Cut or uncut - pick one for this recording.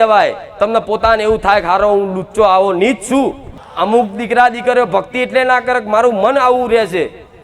cut